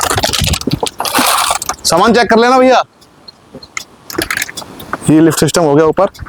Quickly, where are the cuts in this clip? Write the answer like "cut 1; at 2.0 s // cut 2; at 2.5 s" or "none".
none